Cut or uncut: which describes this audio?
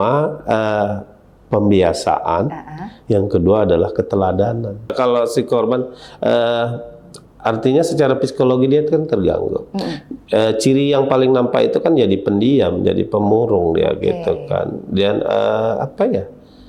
cut